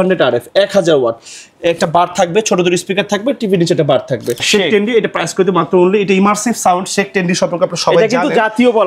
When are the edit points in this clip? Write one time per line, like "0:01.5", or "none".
0:04.4